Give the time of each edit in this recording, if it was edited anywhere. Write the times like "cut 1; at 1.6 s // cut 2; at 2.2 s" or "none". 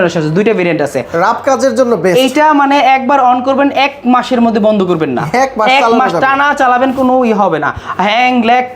cut 1; at 1.1 s